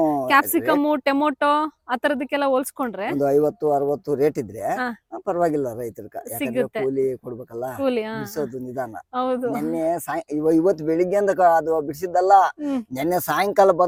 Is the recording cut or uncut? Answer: uncut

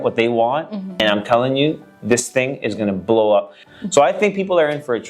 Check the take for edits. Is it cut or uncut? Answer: cut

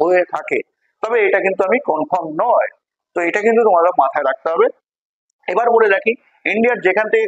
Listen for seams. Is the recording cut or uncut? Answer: uncut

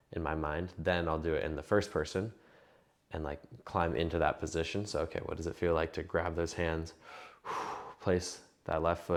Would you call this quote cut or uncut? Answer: uncut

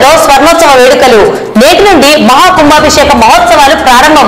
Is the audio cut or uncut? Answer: uncut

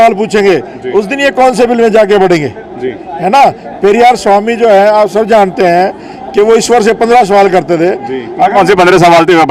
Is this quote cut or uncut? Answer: uncut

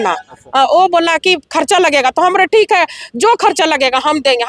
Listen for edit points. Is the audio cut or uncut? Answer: uncut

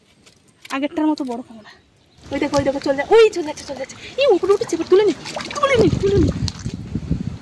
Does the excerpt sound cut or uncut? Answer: cut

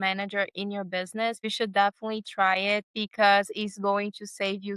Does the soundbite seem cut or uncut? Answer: uncut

